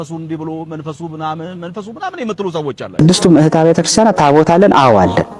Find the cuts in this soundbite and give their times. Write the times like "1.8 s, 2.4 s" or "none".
3.0 s